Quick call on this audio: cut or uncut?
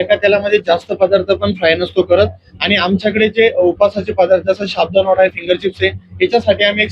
uncut